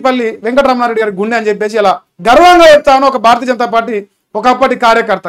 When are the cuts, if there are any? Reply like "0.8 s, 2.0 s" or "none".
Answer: none